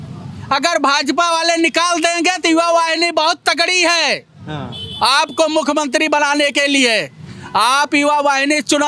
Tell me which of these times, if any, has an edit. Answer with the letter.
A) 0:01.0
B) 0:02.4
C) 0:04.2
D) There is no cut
D